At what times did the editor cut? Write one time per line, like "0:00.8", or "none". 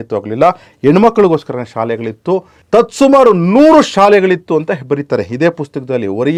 none

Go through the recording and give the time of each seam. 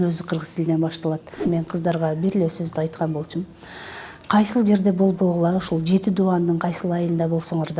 0:01.4

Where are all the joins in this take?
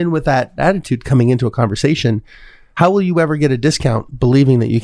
none

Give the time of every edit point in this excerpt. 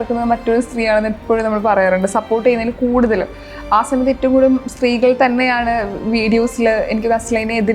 none

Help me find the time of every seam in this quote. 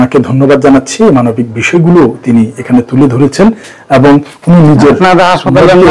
none

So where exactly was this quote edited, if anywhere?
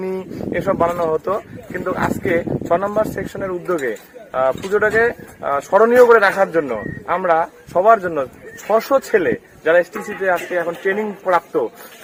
none

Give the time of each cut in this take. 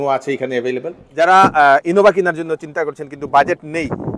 0:01.0

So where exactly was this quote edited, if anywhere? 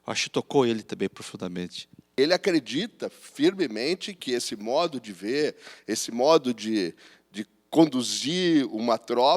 0:02.2

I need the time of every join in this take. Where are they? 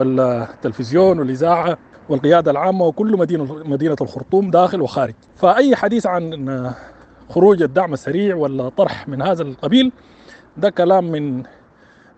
0:01.9
0:05.2

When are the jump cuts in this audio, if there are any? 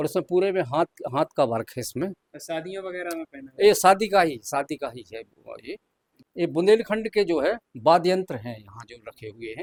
none

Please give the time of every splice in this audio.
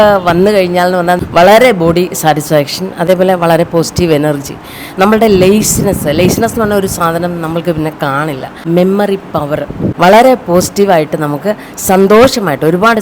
0:01.2
0:08.5
0:09.9

